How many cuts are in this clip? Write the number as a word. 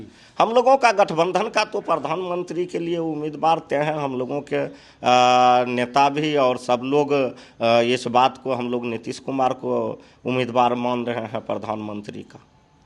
zero